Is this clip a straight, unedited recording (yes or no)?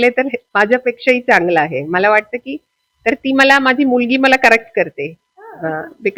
yes